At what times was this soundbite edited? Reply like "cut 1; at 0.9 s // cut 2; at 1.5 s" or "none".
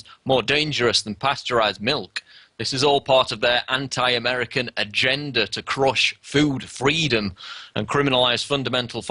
none